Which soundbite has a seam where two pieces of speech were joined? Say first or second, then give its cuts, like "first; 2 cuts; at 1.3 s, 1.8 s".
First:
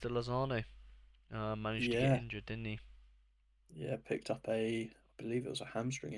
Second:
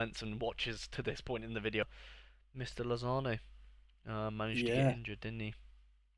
second; 1 cut; at 1.8 s